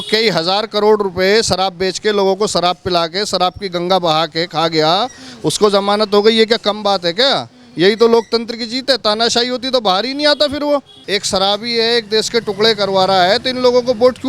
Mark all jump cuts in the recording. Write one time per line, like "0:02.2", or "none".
0:10.9